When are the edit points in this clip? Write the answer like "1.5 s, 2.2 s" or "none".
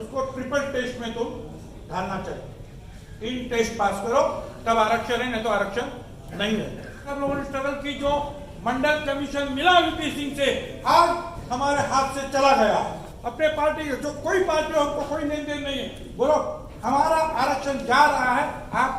7.1 s, 13.1 s